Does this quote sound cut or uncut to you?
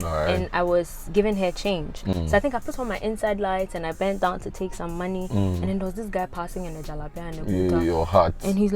uncut